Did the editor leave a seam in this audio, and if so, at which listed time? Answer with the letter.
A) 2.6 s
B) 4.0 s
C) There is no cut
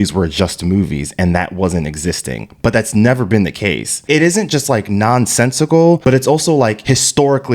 B